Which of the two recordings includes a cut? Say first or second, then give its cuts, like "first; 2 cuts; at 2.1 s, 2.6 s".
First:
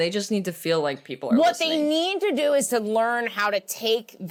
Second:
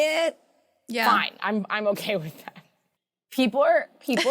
second; 1 cut; at 3.3 s